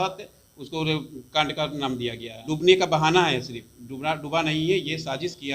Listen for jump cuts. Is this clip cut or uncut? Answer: cut